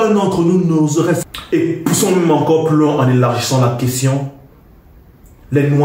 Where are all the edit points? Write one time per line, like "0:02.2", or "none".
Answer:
0:01.2